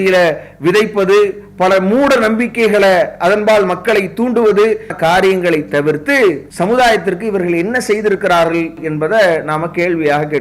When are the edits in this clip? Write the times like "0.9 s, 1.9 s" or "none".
4.9 s, 6.5 s, 8.8 s